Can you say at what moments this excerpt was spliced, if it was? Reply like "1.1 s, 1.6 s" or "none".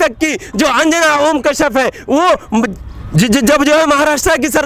none

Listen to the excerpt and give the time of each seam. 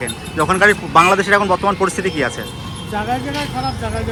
none

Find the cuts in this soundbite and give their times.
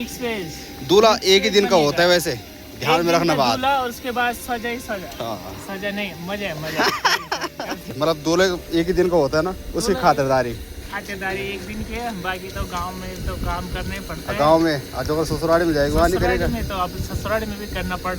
7.9 s

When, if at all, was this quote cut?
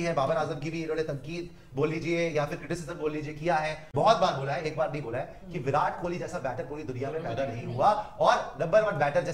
3.8 s

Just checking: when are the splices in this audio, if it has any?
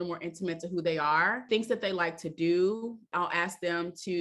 1.4 s, 3.1 s

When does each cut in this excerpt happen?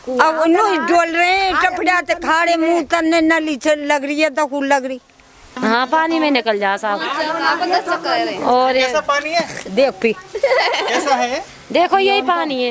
5.5 s

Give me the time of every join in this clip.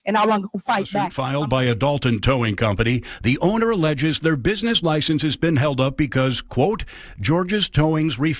1.2 s

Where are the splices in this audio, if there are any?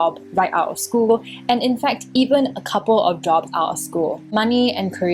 4.2 s

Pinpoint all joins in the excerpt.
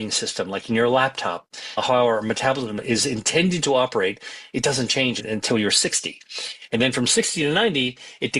none

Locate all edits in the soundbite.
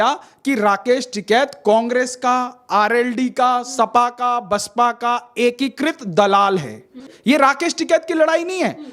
7.1 s

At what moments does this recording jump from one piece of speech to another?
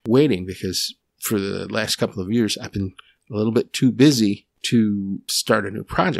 0.9 s, 4.5 s, 5.3 s

